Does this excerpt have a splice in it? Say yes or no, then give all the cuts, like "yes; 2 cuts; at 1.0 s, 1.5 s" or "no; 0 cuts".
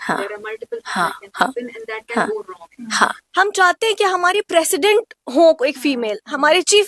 yes; 1 cut; at 3.2 s